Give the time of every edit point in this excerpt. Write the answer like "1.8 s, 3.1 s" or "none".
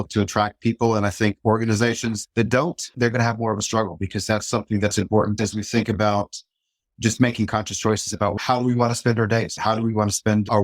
5.3 s, 8.4 s, 9.5 s